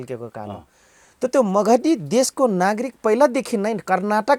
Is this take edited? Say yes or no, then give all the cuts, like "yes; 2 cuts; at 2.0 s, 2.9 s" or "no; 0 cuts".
no; 0 cuts